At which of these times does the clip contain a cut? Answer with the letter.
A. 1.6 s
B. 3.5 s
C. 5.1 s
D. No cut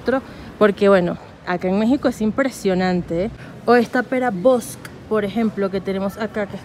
B